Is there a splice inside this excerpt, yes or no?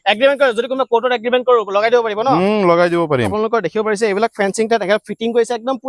yes